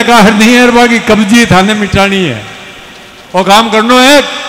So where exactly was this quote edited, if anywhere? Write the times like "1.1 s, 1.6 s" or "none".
none